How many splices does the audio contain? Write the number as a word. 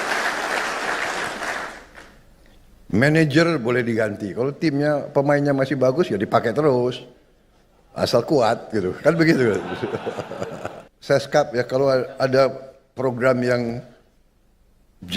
one